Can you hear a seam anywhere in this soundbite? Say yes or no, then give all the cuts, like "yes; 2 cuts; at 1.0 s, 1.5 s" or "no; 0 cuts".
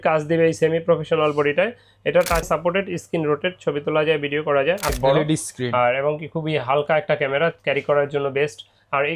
yes; 2 cuts; at 2.4 s, 4.9 s